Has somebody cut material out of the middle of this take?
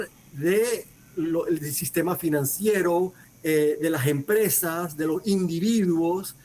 yes; 2 cuts; at 1.0 s, 3.3 s

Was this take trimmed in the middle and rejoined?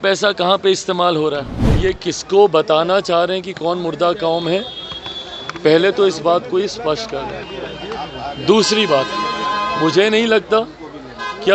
yes; 1 cut; at 1.8 s

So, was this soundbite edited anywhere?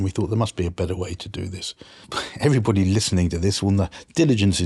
yes; 1 cut; at 2.2 s

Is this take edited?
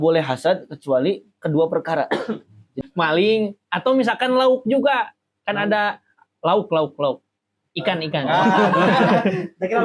yes; 1 cut; at 2.7 s

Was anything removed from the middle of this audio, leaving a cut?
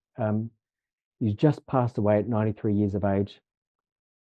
no; 0 cuts

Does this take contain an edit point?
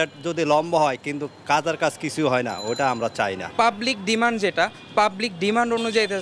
yes; 1 cut; at 3.4 s

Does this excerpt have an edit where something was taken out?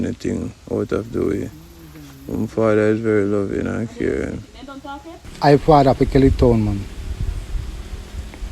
yes; 1 cut; at 5.3 s

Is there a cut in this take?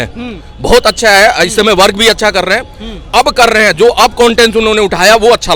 no; 0 cuts

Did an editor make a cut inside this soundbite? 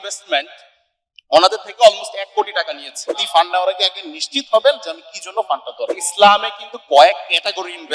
yes; 2 cuts; at 3.2 s, 6.0 s

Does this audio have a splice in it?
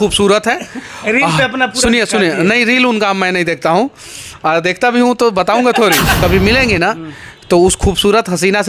yes; 1 cut; at 6.2 s

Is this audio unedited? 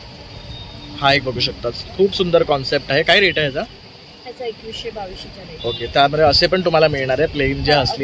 yes; 0 cuts

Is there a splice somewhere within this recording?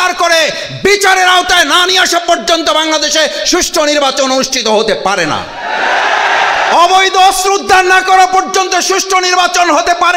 no; 0 cuts

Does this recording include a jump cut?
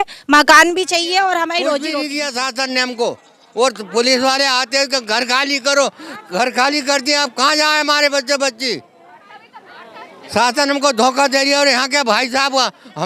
yes; 1 cut; at 2.0 s

